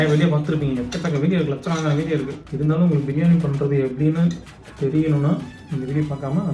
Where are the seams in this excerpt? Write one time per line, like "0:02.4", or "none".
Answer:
0:02.4